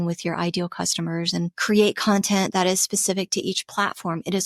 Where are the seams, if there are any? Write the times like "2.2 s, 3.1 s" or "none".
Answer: 1.6 s